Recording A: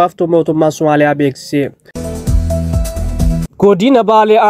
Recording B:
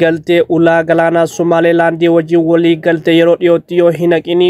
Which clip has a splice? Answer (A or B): A